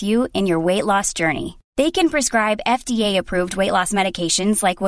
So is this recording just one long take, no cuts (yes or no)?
yes